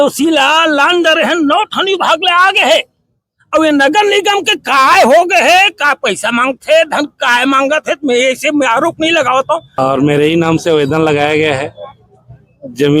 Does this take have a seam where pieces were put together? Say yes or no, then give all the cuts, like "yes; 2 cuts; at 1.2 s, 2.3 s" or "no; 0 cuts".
yes; 1 cut; at 9.7 s